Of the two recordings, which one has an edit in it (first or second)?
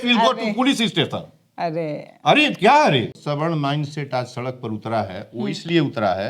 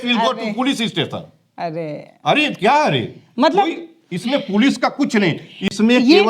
first